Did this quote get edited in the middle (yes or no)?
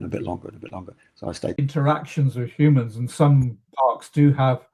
yes